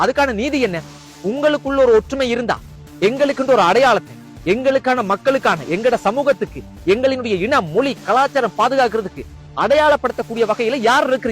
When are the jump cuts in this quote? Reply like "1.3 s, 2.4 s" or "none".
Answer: 1.1 s